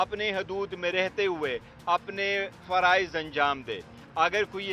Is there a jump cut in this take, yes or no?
no